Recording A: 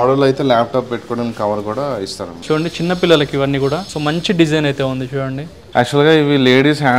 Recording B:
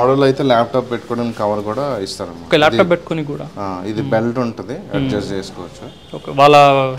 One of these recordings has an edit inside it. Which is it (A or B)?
A